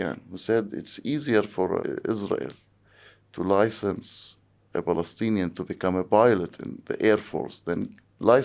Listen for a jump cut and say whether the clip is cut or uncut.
cut